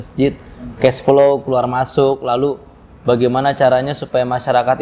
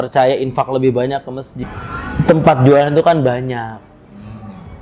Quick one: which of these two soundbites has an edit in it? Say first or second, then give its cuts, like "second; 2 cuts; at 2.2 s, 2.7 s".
second; 1 cut; at 1.5 s